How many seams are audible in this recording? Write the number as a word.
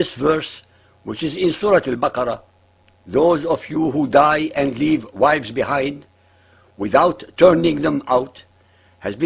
one